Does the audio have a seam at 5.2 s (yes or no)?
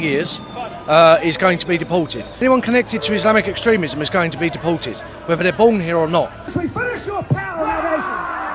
no